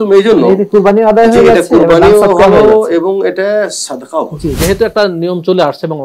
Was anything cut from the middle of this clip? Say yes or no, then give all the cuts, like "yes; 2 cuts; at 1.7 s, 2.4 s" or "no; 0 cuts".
yes; 1 cut; at 4.6 s